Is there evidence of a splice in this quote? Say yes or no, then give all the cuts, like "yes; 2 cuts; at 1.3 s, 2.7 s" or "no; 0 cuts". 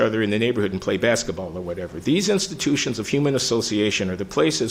no; 0 cuts